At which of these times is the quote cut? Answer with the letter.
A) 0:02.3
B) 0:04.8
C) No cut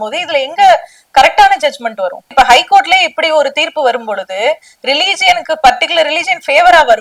A